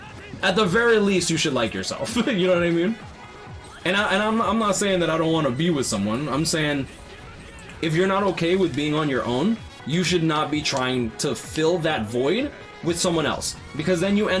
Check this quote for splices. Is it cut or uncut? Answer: uncut